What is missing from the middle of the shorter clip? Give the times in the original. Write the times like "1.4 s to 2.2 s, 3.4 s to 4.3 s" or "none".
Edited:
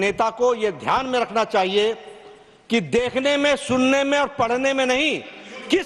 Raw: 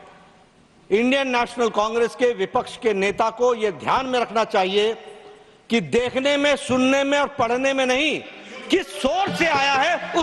none